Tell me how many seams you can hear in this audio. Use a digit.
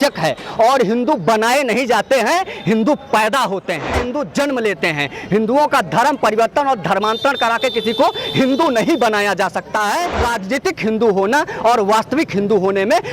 2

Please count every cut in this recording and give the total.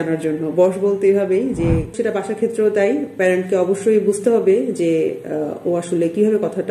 1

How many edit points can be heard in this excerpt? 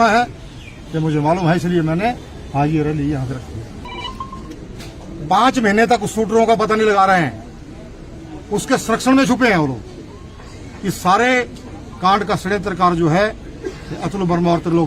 1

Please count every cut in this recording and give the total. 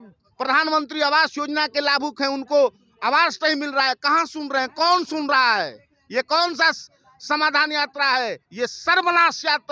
0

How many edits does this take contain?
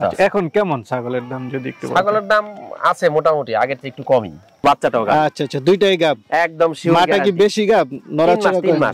1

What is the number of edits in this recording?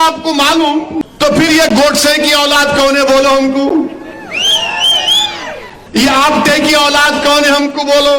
2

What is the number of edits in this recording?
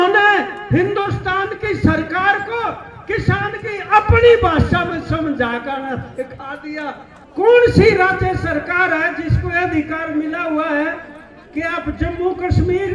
1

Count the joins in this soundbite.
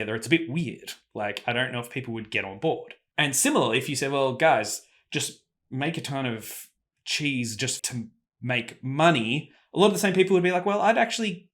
2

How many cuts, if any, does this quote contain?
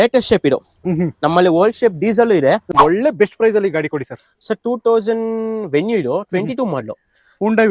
1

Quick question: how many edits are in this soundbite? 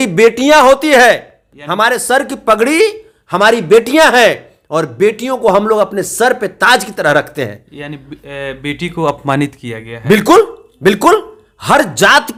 0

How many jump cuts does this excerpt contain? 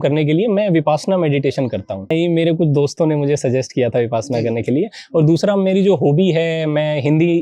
1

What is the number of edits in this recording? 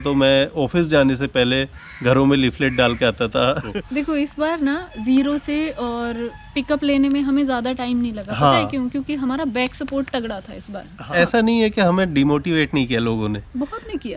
2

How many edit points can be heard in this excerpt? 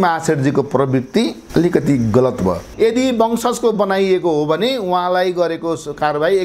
2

